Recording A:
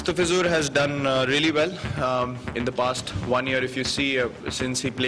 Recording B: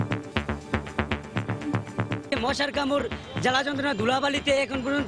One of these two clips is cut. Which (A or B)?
B